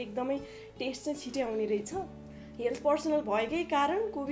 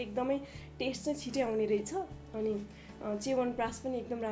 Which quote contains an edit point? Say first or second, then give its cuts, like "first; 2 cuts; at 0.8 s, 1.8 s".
first; 1 cut; at 2.2 s